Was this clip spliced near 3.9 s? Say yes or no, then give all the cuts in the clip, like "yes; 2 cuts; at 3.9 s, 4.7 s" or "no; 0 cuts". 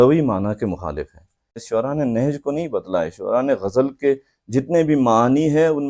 no; 1 cut; at 1.6 s